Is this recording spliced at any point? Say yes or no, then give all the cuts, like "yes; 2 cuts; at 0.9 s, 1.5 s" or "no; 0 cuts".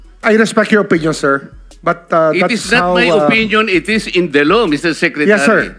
no; 0 cuts